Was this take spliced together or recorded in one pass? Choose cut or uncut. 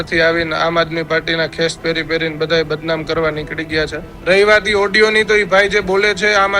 cut